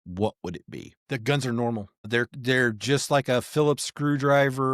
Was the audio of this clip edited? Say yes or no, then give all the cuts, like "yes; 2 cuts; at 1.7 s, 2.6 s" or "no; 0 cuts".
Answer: yes; 2 cuts; at 0.9 s, 2.1 s